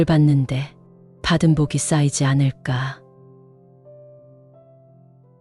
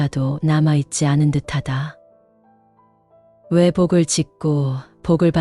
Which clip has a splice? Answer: second; 2 cuts; at 1.9 s, 3.3 s

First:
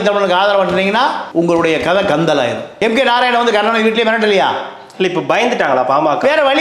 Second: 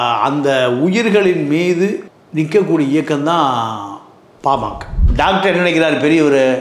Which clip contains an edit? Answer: second; 1 cut; at 5.0 s

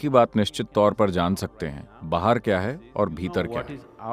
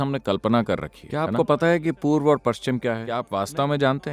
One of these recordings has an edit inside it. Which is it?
second; 2 cuts; at 1.0 s, 3.2 s

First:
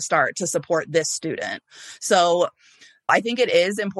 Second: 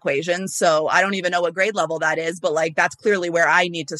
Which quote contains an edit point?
first; 1 cut; at 3.1 s

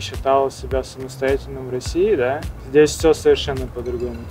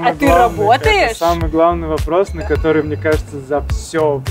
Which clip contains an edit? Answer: first; 1 cut; at 2.5 s

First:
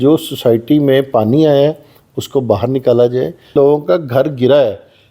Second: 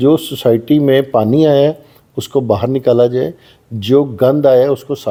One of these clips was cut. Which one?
first; 1 cut; at 3.5 s

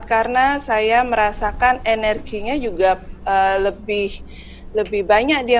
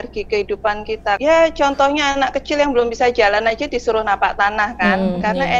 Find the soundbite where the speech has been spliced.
second; 1 cut; at 1.2 s

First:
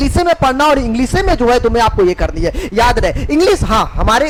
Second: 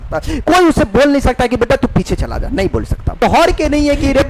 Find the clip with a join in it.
second; 1 cut; at 3.2 s

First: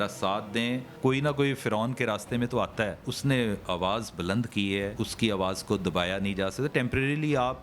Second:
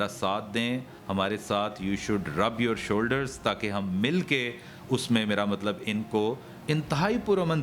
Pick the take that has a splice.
first; 3 cuts; at 0.9 s, 3.1 s, 4.9 s

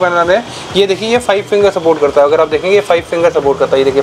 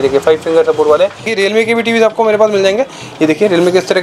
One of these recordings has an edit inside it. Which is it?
second; 1 cut; at 1.3 s

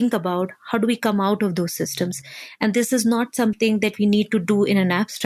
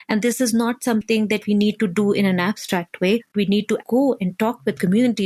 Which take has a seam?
second; 1 cut; at 3.8 s

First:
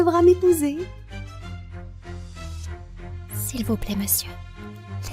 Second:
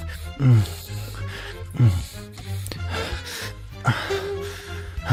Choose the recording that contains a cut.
first; 2 cuts; at 0.9 s, 3.5 s

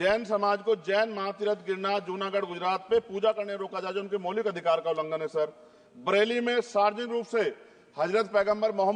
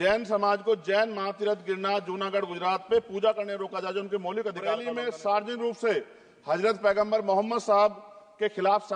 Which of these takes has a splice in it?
second; 1 cut; at 4.9 s

